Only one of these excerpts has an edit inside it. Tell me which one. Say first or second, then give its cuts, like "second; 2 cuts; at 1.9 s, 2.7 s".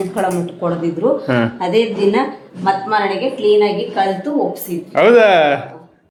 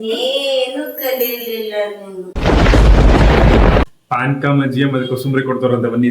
second; 1 cut; at 3.8 s